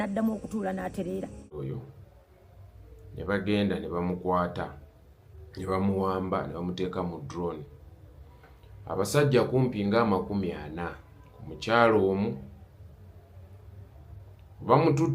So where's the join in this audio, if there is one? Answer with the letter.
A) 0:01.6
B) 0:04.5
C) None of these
A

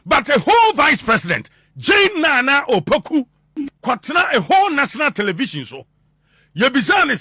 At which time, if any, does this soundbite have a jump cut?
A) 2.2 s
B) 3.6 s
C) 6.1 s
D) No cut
B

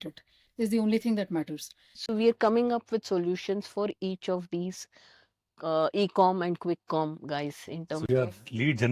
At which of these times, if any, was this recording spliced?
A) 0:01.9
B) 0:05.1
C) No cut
A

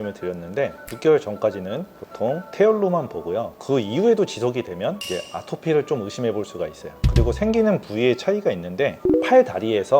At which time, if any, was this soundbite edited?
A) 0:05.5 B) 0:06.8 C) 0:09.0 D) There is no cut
C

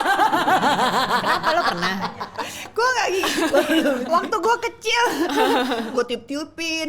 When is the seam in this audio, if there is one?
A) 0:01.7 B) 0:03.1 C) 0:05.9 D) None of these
C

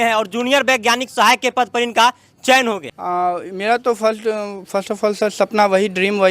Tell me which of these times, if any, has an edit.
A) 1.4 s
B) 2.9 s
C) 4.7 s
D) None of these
B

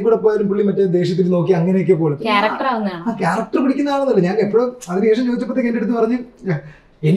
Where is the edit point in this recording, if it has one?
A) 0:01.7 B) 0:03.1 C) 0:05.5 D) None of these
D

